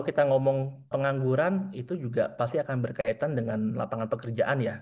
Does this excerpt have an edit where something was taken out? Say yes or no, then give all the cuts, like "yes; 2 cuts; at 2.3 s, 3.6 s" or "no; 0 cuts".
yes; 1 cut; at 0.9 s